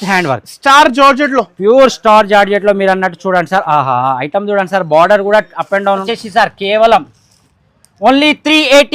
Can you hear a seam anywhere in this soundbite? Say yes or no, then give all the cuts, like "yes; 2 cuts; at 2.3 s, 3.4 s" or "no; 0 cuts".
yes; 1 cut; at 6.1 s